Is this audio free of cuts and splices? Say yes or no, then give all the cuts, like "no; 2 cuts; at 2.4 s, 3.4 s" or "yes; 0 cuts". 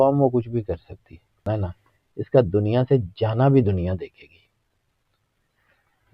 no; 1 cut; at 1.4 s